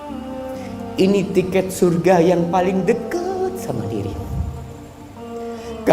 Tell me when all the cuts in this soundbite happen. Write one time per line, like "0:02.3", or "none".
0:00.9

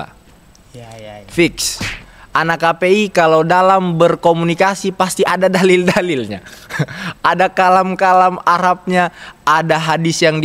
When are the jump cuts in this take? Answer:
none

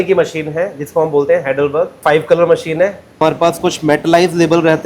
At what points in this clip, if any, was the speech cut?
0:02.0
0:03.2

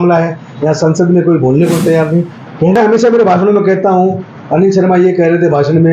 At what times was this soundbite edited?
0:02.8

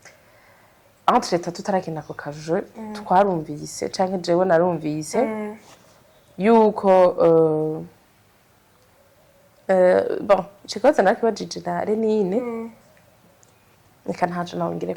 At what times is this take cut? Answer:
none

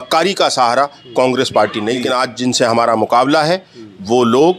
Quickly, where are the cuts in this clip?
0:02.0

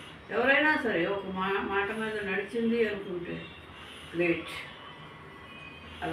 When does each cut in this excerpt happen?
none

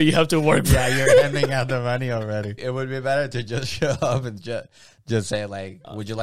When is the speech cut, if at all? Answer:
0:02.6

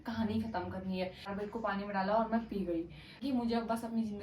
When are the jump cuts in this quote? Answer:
0:01.3
0:03.2

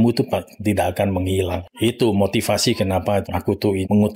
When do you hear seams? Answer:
0:01.6
0:03.2

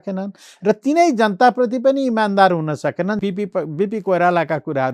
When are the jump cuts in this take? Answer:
0:03.2

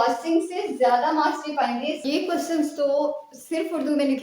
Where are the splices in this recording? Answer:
0:02.0

